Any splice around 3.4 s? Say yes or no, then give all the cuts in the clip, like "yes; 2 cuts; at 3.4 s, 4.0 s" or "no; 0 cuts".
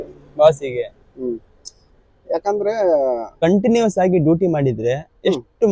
yes; 1 cut; at 3.4 s